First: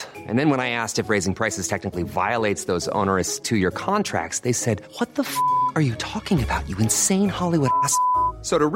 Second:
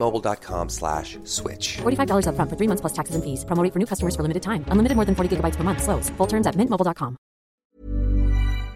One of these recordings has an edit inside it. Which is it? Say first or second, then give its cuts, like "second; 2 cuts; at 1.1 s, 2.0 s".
second; 1 cut; at 7.6 s